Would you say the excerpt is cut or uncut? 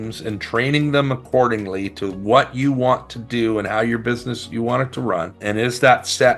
uncut